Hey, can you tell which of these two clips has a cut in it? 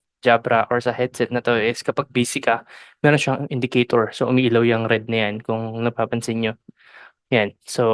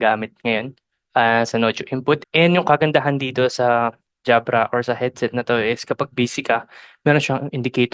second; 1 cut; at 2.3 s

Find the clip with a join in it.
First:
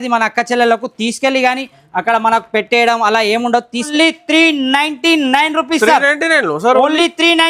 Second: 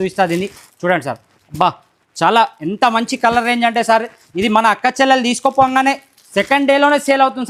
first; 1 cut; at 3.9 s

